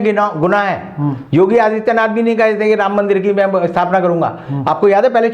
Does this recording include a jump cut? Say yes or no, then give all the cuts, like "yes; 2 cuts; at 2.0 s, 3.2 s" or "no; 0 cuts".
no; 0 cuts